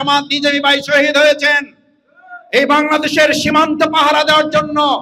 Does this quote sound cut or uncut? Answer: uncut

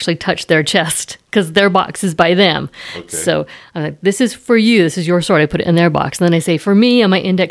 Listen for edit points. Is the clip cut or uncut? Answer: uncut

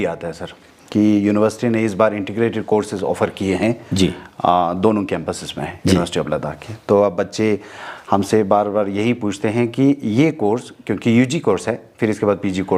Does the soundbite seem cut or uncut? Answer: uncut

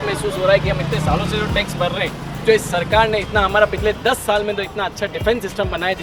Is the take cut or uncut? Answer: uncut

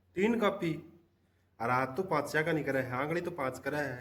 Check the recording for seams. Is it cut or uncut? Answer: uncut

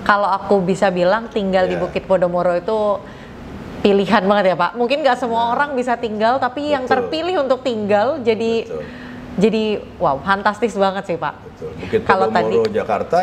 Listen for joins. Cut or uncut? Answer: uncut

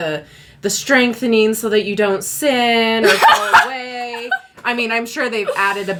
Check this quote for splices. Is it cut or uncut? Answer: uncut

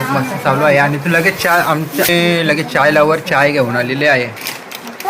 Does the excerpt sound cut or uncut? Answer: uncut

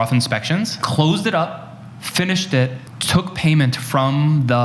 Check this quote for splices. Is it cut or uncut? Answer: uncut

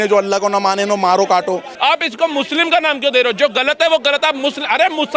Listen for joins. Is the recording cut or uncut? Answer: cut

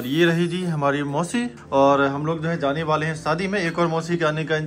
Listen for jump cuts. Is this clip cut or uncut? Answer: cut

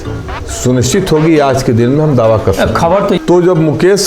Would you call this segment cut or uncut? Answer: cut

